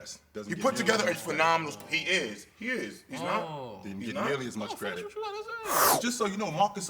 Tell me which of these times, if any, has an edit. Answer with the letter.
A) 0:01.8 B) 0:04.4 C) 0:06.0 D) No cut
C